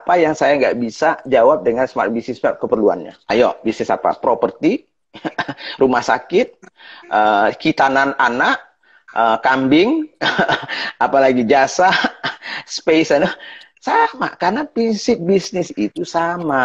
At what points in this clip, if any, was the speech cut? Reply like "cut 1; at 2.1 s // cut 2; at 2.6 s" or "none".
cut 1; at 3.2 s